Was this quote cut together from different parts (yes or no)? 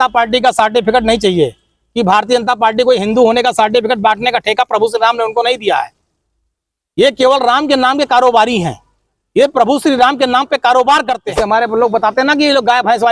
yes